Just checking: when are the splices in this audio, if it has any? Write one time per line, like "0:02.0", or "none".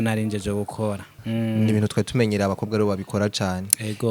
0:01.1